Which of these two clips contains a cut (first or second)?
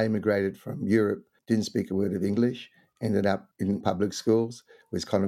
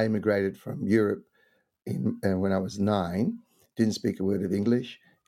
first